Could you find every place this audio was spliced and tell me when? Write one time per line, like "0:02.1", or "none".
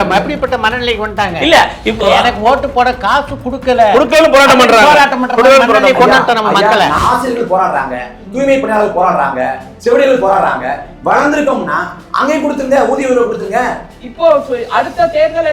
0:07.0